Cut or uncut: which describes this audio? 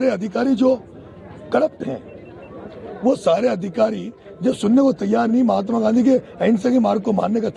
uncut